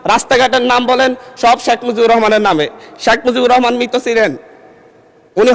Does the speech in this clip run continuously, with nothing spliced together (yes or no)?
yes